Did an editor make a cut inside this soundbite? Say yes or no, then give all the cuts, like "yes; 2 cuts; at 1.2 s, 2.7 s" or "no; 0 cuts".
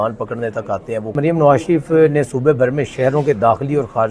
yes; 1 cut; at 1.2 s